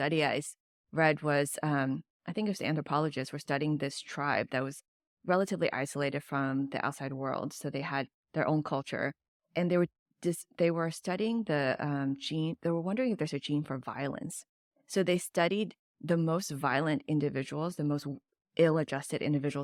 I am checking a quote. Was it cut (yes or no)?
no